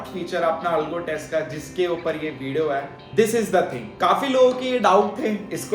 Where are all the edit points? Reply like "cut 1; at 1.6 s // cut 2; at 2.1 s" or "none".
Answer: cut 1; at 3.0 s // cut 2; at 3.8 s